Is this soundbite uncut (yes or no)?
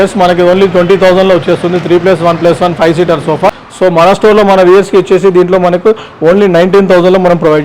no